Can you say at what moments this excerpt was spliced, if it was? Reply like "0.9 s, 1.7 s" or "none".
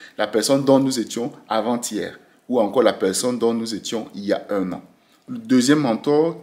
5.3 s

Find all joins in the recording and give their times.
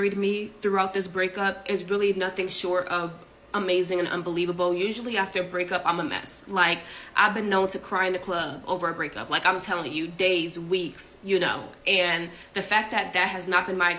7.0 s

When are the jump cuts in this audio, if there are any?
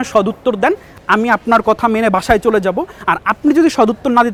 none

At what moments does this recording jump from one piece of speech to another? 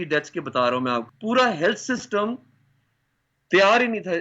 1.1 s

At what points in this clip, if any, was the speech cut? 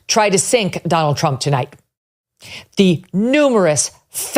2.5 s

